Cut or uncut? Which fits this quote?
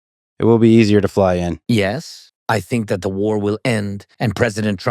cut